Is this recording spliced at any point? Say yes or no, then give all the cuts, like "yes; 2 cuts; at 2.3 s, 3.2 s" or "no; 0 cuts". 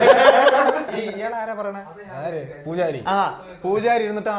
no; 0 cuts